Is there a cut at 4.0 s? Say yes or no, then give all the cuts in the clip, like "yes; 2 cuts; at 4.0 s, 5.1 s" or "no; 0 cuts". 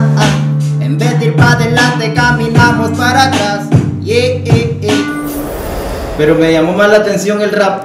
no; 1 cut; at 5.5 s